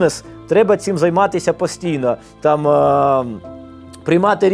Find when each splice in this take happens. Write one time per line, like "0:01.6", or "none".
none